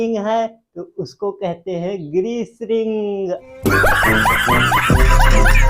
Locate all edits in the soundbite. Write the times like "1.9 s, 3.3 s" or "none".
3.5 s